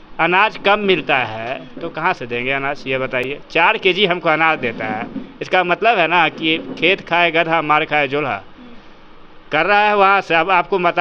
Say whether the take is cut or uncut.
uncut